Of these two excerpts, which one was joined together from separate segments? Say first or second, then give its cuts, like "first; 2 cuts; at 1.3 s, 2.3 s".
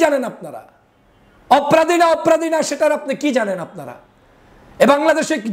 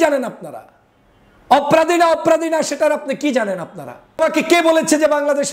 second; 1 cut; at 4.2 s